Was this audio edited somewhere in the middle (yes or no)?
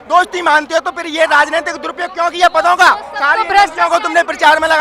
no